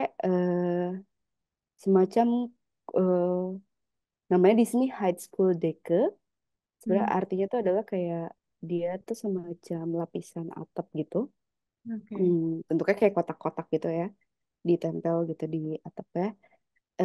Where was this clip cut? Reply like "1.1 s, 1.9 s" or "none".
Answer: none